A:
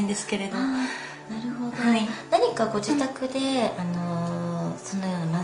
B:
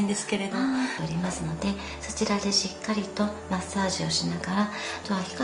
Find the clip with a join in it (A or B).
A